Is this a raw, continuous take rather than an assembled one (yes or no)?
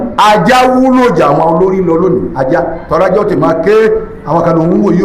yes